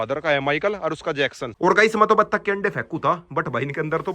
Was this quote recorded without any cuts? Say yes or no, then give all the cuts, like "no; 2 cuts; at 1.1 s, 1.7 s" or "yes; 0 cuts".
no; 1 cut; at 1.4 s